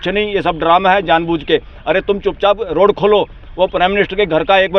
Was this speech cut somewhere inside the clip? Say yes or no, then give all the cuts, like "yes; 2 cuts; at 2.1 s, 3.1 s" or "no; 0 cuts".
no; 0 cuts